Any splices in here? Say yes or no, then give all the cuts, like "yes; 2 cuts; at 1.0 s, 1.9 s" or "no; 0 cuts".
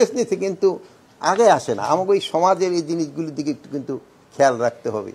no; 0 cuts